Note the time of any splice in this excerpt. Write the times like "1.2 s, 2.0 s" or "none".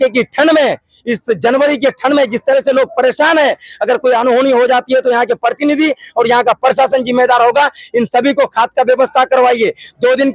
none